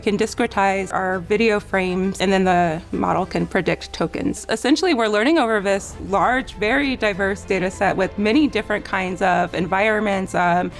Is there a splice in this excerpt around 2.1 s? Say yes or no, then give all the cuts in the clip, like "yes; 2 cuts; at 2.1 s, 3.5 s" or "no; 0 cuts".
yes; 3 cuts; at 0.9 s, 2.1 s, 4.4 s